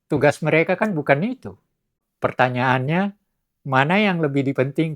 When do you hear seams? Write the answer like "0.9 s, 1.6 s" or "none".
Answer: 2.1 s